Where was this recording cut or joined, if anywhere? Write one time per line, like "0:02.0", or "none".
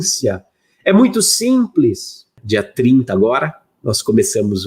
0:02.4